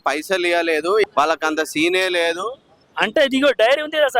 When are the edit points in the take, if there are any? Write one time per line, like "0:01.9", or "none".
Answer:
0:01.0